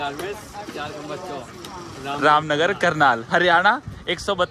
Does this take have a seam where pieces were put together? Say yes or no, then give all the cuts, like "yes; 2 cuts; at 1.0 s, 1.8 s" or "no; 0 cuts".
no; 0 cuts